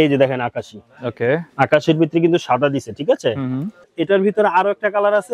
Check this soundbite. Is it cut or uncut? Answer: cut